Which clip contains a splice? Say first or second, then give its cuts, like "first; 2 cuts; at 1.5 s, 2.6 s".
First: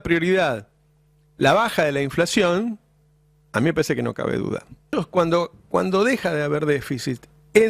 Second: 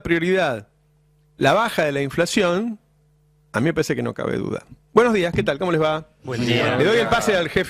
first; 1 cut; at 4.9 s